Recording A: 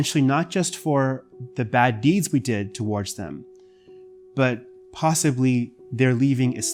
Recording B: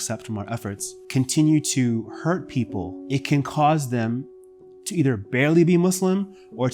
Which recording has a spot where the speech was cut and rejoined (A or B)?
B